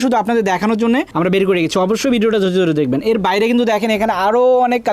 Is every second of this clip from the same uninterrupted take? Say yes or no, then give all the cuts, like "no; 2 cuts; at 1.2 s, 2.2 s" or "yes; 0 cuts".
yes; 0 cuts